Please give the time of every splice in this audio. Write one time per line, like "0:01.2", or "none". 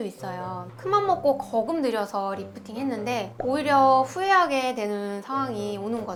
none